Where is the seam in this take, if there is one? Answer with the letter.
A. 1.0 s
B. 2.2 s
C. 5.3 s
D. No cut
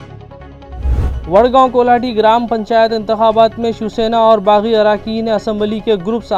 A